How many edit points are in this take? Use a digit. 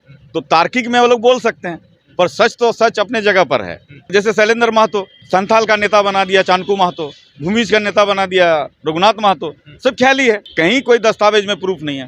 3